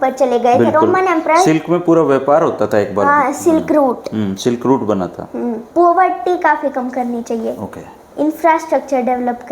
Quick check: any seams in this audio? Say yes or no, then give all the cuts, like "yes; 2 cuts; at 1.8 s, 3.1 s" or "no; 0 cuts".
yes; 1 cut; at 5.6 s